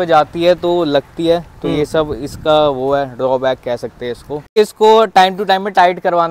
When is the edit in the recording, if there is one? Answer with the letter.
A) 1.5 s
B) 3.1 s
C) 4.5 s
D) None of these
C